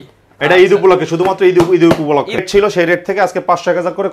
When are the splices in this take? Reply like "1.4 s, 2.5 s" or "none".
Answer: 2.4 s